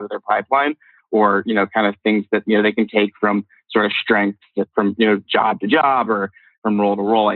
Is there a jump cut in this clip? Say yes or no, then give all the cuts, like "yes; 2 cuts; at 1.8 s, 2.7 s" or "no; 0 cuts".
yes; 2 cuts; at 4.7 s, 6.5 s